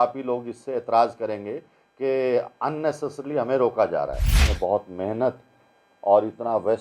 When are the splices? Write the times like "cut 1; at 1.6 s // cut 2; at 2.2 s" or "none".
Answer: cut 1; at 4.4 s

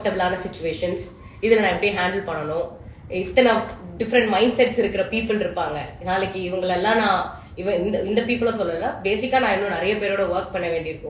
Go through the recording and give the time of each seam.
none

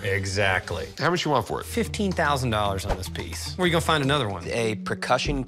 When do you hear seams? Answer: cut 1; at 4.5 s

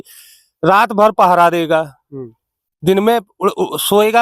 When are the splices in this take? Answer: none

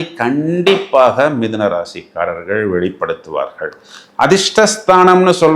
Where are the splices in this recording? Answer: none

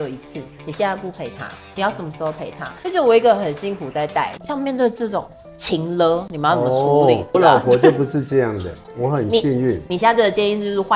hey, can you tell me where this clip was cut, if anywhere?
cut 1; at 2.7 s // cut 2; at 7.3 s

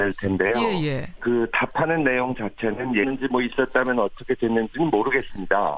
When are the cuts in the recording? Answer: none

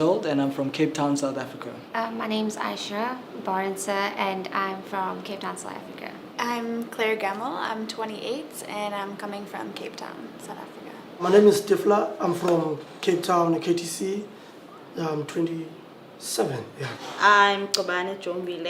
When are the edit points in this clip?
cut 1; at 15.1 s

